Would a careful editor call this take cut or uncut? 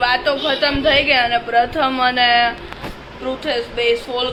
uncut